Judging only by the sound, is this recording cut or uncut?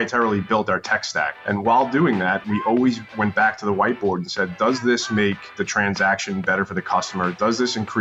uncut